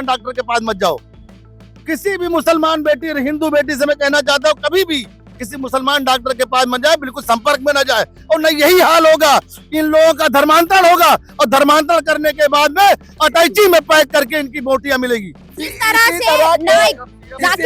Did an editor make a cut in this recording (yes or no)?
no